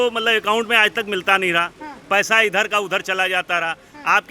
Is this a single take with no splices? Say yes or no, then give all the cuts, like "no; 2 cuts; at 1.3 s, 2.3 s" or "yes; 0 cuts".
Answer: yes; 0 cuts